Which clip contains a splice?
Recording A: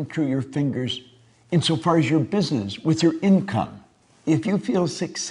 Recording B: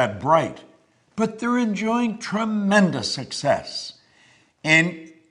B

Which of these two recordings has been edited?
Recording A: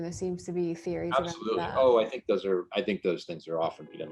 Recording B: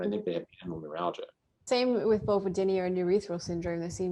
B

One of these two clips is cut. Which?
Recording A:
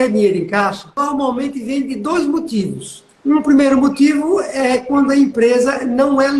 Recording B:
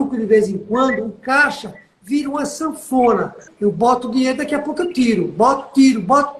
A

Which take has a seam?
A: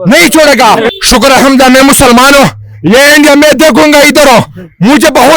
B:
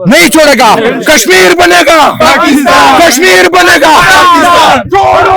A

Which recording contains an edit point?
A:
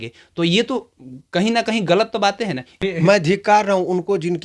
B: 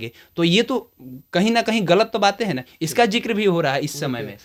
A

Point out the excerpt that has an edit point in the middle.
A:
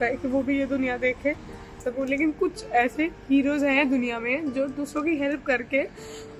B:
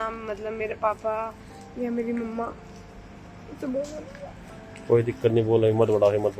A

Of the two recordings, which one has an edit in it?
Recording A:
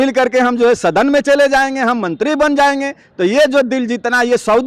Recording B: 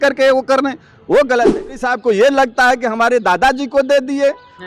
B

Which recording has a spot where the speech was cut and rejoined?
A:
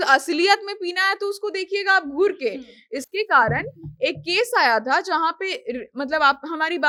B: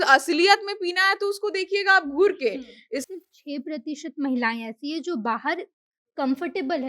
B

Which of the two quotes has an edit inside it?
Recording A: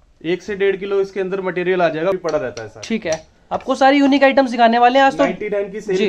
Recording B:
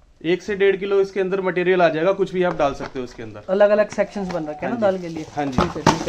A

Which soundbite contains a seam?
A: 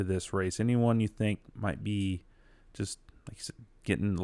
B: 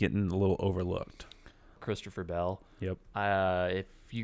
B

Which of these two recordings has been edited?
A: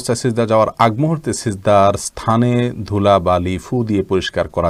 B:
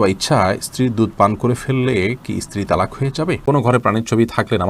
B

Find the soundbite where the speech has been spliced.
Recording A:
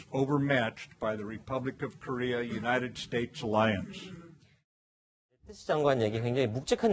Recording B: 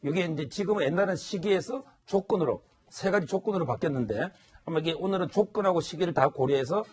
A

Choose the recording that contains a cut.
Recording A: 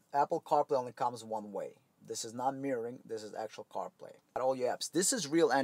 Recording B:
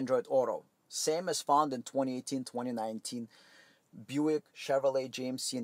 A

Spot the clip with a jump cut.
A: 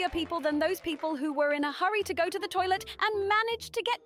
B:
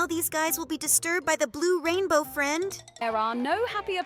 B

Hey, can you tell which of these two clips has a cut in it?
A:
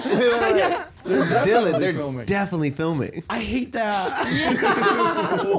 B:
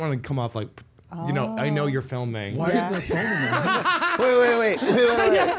B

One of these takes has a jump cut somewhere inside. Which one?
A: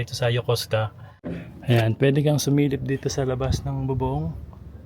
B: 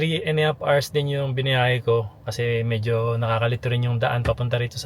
A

